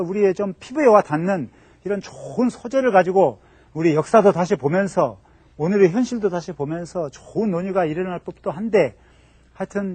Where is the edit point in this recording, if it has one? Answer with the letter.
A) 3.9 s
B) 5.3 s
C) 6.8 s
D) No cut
C